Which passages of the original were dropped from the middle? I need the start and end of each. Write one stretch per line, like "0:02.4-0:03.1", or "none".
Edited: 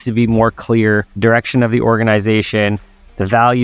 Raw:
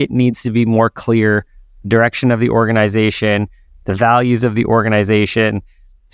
0:01.5-0:01.8